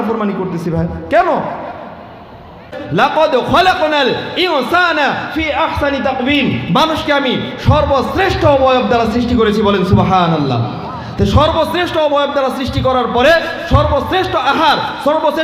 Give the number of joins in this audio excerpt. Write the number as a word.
one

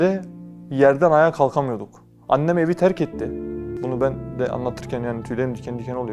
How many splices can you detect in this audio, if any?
one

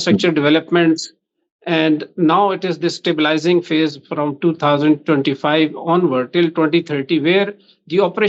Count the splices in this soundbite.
zero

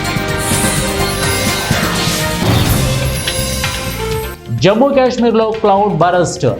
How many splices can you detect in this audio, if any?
one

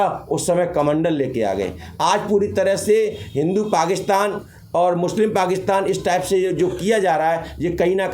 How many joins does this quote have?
zero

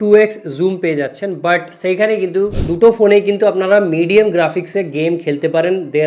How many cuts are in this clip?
one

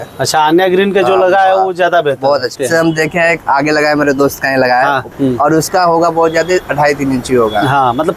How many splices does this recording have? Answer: two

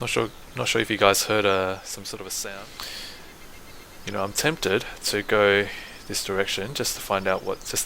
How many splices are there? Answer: one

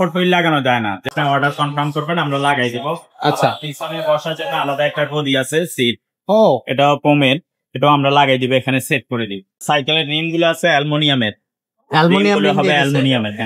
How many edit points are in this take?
two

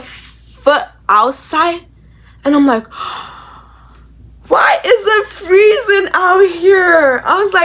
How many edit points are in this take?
zero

